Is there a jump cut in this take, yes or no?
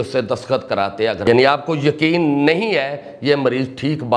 yes